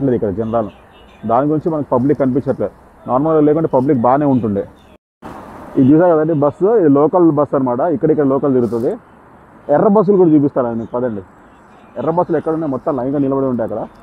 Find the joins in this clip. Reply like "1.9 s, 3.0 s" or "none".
4.9 s